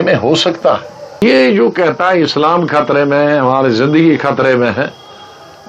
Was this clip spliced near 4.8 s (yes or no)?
no